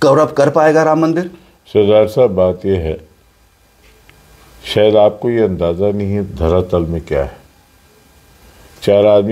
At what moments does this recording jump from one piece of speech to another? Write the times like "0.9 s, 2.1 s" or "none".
none